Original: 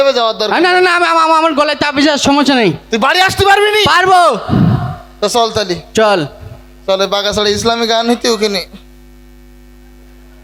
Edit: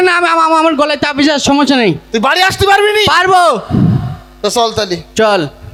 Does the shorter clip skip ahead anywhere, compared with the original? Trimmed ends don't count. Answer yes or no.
no